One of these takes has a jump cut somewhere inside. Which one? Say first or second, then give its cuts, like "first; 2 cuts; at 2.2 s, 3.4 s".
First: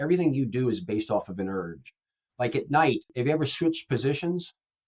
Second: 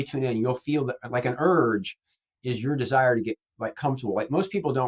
first; 1 cut; at 3.1 s